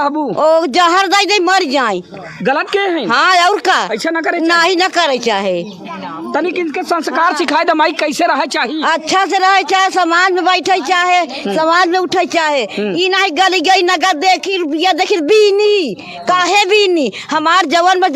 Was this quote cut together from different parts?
no; 0 cuts

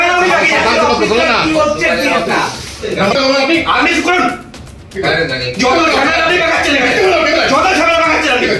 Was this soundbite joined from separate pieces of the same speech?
yes; 1 cut; at 2.9 s

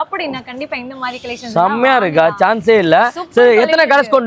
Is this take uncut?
yes; 0 cuts

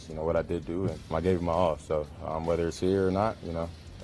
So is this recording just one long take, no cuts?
no; 1 cut; at 1.1 s

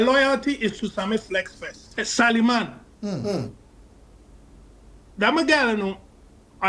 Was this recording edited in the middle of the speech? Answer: yes; 1 cut; at 1.8 s

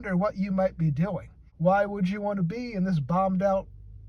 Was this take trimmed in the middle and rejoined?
yes; 1 cut; at 1.4 s

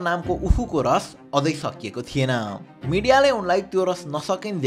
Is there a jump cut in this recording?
no; 0 cuts

